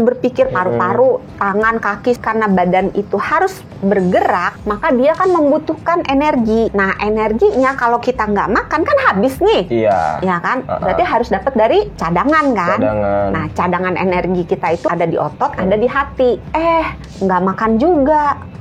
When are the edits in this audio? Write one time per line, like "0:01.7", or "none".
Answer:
0:02.2
0:04.5
0:06.7
0:12.0
0:14.9
0:16.4

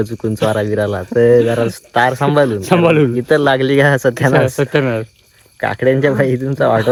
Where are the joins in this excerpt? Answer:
none

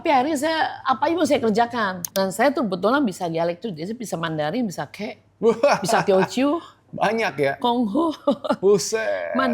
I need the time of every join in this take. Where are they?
0:02.0

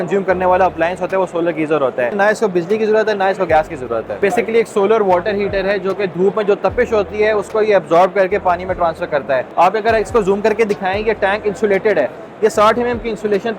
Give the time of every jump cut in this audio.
0:02.1
0:04.2
0:09.5

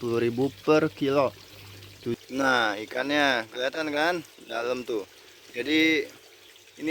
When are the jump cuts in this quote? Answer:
0:02.2

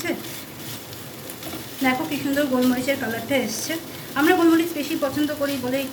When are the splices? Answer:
none

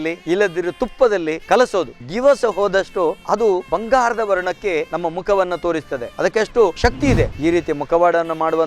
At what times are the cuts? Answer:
0:01.8
0:03.6
0:07.3

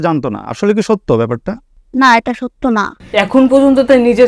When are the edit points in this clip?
0:02.9

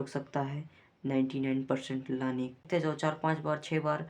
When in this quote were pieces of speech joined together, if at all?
0:02.6

